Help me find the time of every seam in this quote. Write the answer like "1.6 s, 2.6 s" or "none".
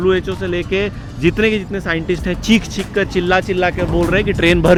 none